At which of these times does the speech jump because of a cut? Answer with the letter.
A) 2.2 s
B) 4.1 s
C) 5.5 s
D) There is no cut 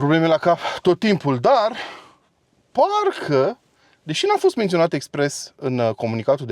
D